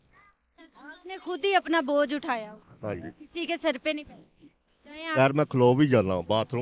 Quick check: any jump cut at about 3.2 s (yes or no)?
no